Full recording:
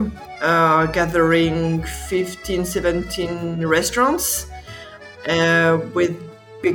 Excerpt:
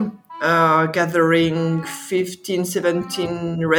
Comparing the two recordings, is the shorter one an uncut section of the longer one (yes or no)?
yes